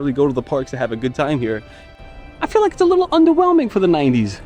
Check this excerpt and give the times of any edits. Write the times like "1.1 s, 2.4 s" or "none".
1.9 s